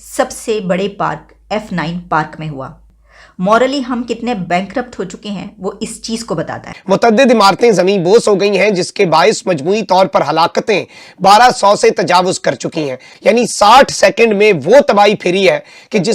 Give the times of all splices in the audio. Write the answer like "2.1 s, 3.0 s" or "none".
6.7 s, 13.0 s